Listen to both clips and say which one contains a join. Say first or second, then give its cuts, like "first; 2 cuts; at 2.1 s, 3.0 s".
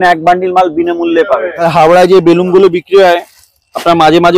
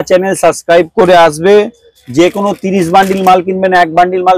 first; 1 cut; at 1.6 s